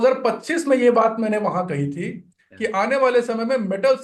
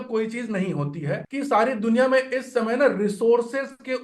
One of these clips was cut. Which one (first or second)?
second